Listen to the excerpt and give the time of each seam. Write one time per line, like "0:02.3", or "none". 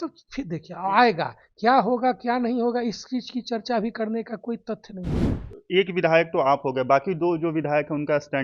0:05.3